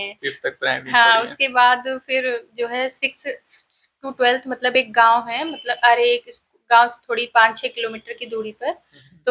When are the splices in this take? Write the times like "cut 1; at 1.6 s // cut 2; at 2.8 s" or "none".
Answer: none